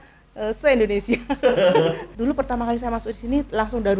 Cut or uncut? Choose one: cut